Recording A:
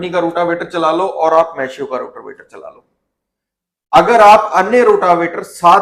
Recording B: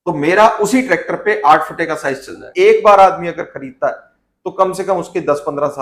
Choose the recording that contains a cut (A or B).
B